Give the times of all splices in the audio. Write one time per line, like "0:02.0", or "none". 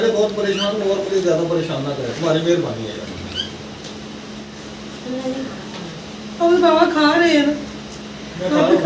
0:04.5